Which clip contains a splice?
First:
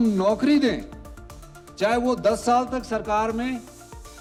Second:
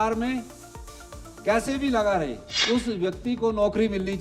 second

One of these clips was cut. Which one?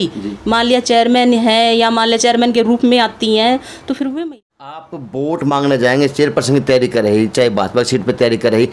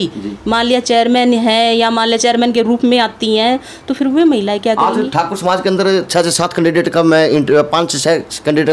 first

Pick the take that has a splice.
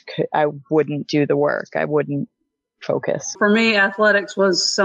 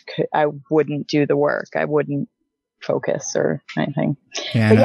first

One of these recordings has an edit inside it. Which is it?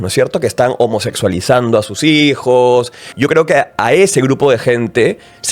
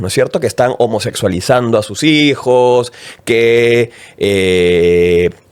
first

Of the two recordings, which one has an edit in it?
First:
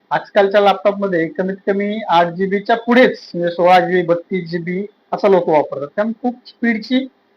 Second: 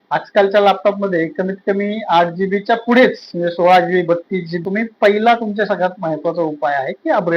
second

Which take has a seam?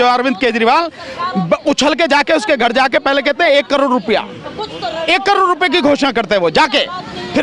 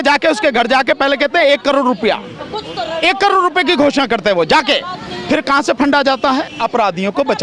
second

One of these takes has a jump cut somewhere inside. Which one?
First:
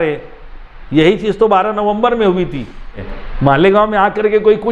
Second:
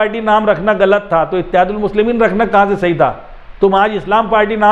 first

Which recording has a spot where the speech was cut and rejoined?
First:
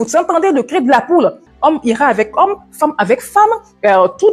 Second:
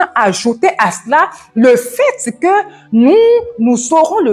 first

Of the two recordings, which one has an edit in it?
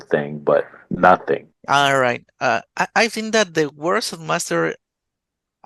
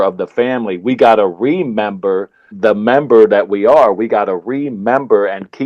first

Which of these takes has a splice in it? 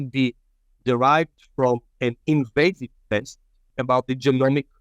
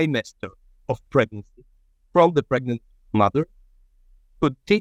first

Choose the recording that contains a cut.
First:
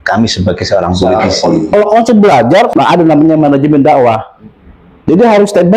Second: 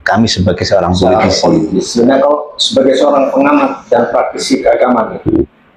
first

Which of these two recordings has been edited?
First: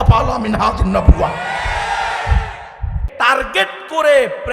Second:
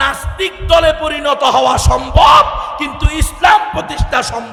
first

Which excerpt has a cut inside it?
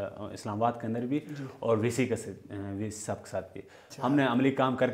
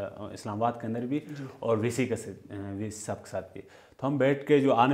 first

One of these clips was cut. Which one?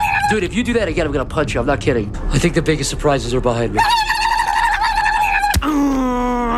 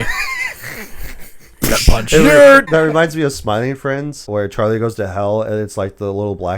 second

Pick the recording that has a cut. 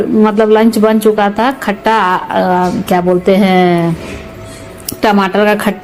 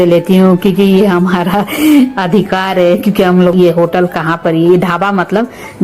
second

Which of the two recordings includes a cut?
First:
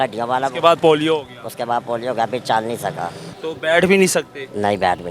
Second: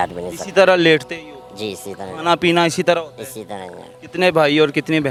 first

